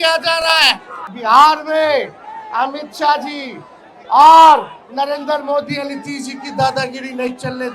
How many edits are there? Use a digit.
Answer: 1